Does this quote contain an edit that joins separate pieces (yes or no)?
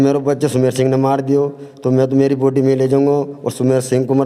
no